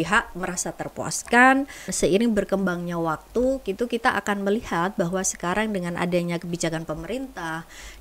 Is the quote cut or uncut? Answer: cut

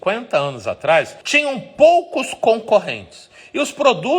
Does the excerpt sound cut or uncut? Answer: cut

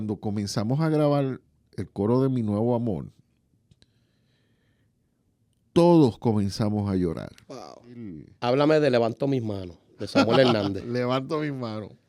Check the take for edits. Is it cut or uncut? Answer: cut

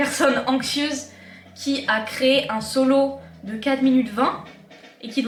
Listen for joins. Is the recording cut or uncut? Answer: uncut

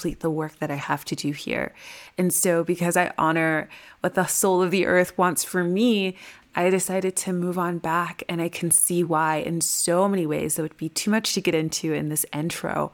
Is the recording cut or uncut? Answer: uncut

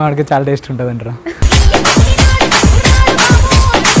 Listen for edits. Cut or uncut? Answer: cut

